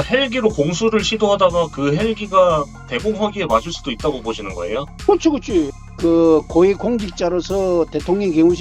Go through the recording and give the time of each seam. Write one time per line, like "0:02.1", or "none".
0:05.8